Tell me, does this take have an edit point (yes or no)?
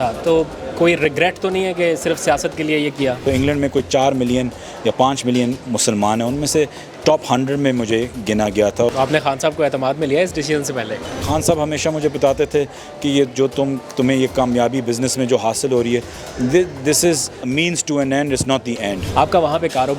yes